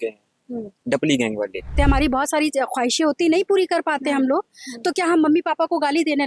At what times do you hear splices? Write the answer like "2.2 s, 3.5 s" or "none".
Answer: 1.7 s